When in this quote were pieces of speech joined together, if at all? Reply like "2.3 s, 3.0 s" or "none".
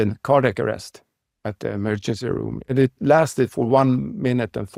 none